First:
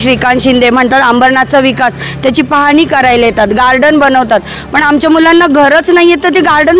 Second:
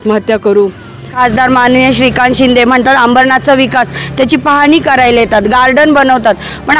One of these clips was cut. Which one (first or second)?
second